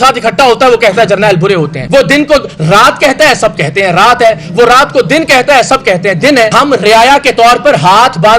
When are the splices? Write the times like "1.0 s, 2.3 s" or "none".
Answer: 6.5 s